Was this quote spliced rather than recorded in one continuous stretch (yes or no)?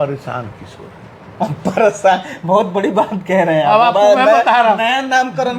no